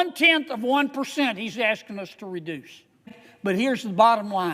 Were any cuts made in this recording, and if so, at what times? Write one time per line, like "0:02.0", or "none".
0:03.2